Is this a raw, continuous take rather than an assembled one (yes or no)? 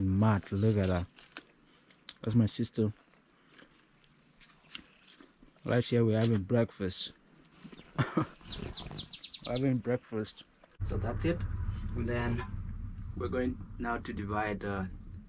no